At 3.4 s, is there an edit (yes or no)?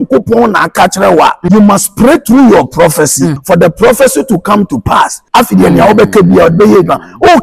yes